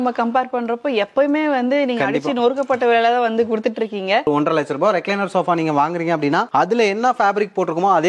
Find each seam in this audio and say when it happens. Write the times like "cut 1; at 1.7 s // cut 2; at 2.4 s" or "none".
cut 1; at 4.3 s